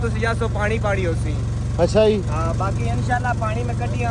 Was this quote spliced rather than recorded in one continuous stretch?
no; 0 cuts

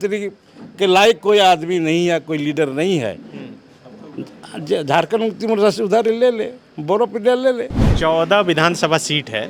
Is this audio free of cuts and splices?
no; 1 cut; at 7.8 s

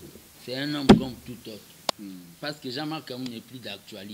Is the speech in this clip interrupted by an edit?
yes; 1 cut; at 1.9 s

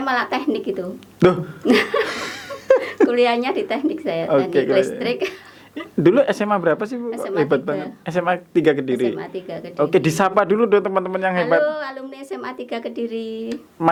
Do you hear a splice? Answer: no; 0 cuts

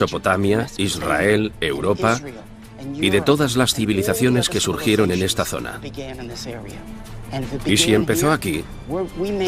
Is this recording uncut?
no; 1 cut; at 8.0 s

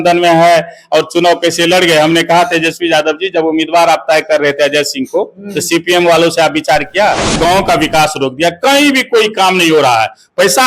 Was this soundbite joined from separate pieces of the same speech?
yes; 1 cut; at 7.4 s

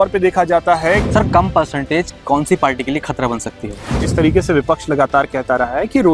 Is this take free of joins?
no; 2 cuts; at 1.0 s, 4.0 s

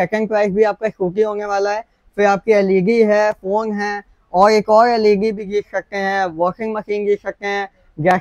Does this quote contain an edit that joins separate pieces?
no; 0 cuts

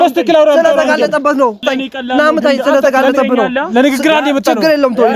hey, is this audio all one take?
no; 1 cut; at 1.6 s

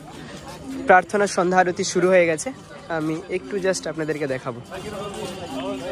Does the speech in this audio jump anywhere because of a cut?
yes; 1 cut; at 4.7 s

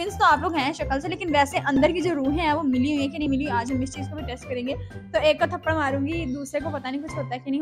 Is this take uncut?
yes; 0 cuts

